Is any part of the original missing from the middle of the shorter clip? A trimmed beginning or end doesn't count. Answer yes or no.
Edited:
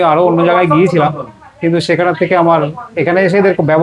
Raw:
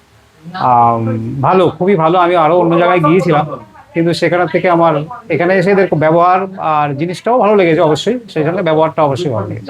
no